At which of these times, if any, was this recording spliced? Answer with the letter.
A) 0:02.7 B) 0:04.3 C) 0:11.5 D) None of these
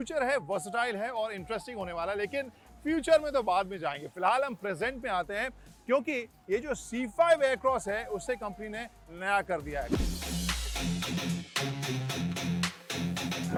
D